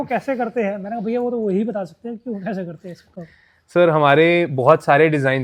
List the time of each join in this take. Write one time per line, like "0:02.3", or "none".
none

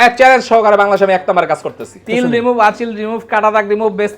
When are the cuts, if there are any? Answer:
0:02.0

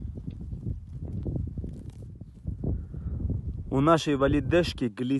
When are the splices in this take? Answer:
0:02.4

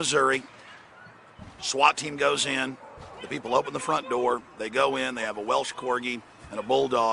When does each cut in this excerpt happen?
0:02.0

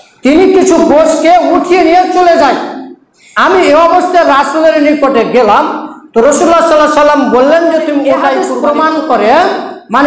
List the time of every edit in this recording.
0:08.5

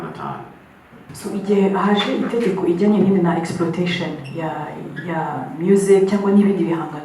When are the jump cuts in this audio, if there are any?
0:01.1

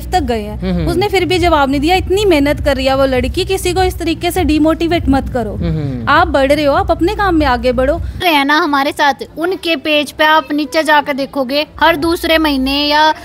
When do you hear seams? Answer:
0:08.2

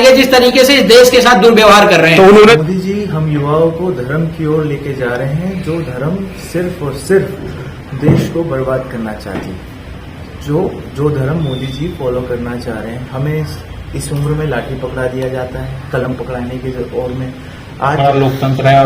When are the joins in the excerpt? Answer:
0:02.3
0:18.0

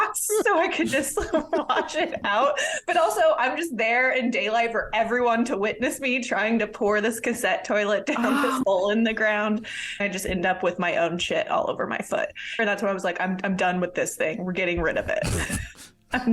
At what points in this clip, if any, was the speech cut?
0:10.0
0:12.6

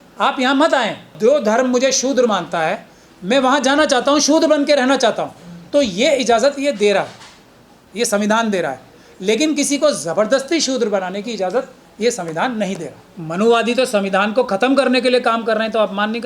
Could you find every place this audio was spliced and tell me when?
0:01.1
0:13.2

